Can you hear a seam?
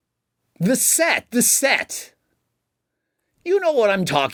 no; 0 cuts

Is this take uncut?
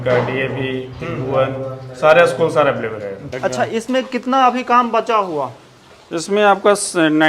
no; 1 cut; at 3.3 s

